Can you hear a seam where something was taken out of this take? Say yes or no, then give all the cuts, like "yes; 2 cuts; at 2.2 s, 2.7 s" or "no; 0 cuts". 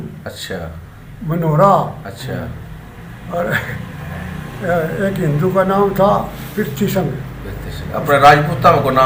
no; 0 cuts